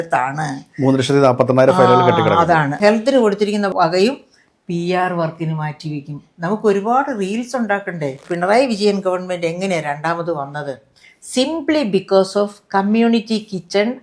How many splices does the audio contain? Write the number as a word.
three